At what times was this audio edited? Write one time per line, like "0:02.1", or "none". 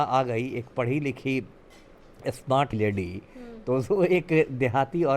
0:02.8